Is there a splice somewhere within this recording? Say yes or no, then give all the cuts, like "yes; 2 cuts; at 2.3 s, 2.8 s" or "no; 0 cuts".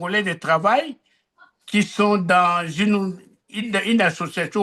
no; 0 cuts